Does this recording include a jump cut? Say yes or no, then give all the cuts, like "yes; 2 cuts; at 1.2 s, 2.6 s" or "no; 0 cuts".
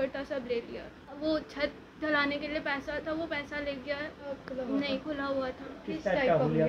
yes; 2 cuts; at 1.2 s, 4.4 s